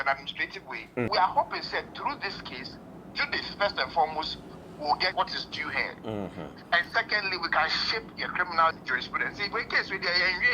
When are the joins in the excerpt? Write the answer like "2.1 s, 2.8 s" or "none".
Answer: 1.1 s, 5.1 s, 8.8 s

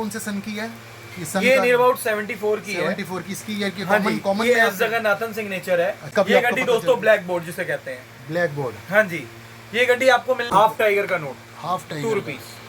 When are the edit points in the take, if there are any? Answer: 6.0 s, 10.7 s

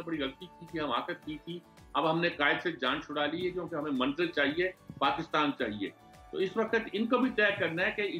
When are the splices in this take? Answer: none

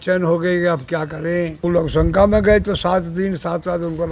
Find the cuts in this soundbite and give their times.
1.6 s

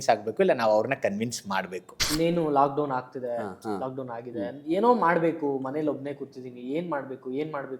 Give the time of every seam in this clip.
2.0 s

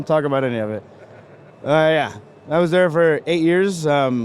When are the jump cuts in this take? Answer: none

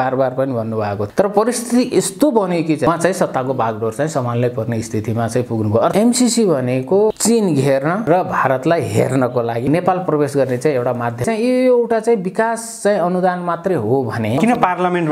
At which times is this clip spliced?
1.0 s, 2.9 s, 5.9 s, 7.1 s, 8.1 s, 9.7 s, 11.2 s, 14.4 s

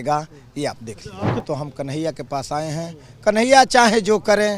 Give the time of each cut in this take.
1.4 s

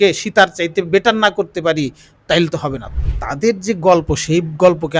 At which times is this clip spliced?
2.8 s

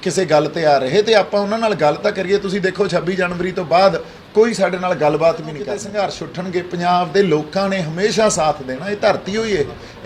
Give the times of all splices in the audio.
5.8 s

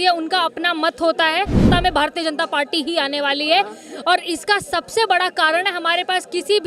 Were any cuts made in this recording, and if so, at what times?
1.7 s

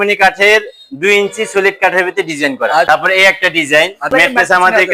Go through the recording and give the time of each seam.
2.9 s, 4.0 s

